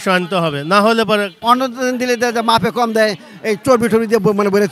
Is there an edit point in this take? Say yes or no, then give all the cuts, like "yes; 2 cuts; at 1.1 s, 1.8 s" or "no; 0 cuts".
yes; 1 cut; at 1.3 s